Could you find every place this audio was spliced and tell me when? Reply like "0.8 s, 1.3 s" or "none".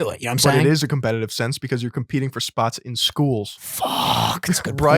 3.6 s